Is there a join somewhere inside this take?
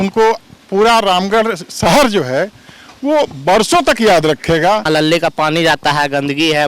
yes; 1 cut; at 4.8 s

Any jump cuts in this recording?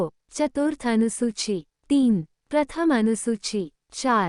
no; 0 cuts

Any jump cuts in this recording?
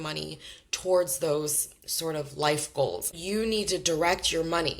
yes; 1 cut; at 3.0 s

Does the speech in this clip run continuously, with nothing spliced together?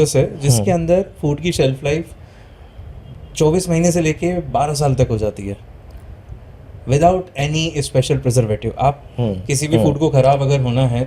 yes; 0 cuts

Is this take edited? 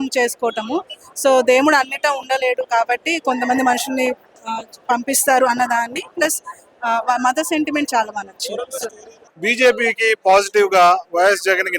yes; 1 cut; at 9.2 s

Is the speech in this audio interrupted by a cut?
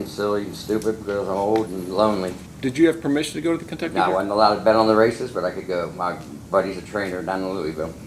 yes; 1 cut; at 2.4 s

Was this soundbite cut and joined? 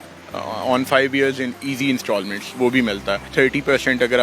yes; 1 cut; at 3.2 s

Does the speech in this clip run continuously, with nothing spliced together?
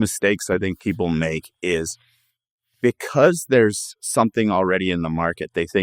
yes; 0 cuts

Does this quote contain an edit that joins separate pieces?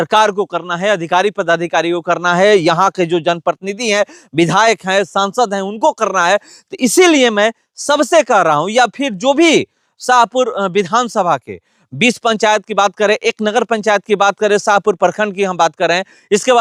no; 0 cuts

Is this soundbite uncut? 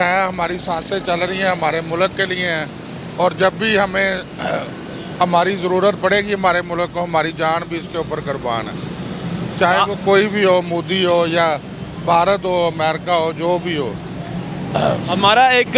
yes; 0 cuts

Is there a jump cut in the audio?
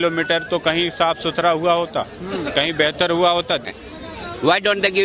yes; 1 cut; at 3.7 s

